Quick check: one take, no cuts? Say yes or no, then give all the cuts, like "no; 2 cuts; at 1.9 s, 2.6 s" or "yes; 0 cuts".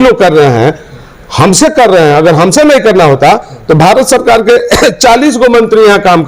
yes; 0 cuts